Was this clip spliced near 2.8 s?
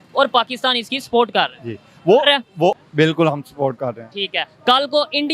yes; 1 cut; at 2.8 s

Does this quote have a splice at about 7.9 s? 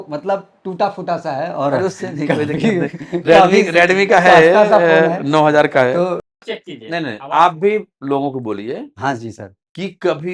no; 1 cut; at 6.4 s

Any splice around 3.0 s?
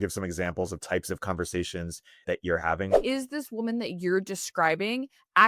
yes; 1 cut; at 3.0 s

